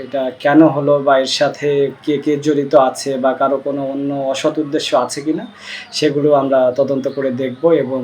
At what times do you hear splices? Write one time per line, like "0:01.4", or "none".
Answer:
none

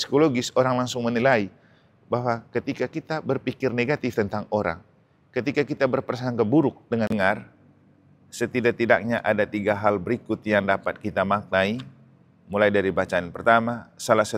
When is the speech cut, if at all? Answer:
0:07.1

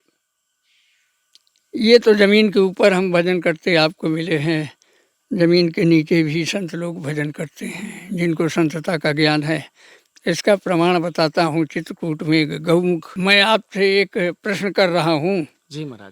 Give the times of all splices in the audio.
0:13.1

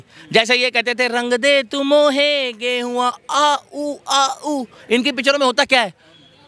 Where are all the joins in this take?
none

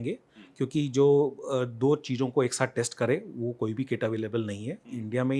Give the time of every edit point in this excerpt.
none

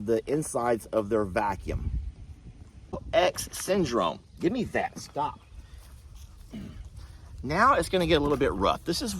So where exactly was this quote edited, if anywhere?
0:03.0

